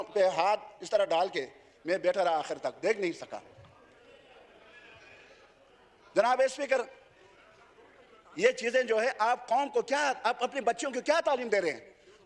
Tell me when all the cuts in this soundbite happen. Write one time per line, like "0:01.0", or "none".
none